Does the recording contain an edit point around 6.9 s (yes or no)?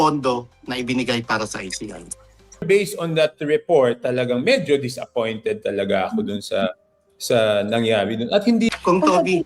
no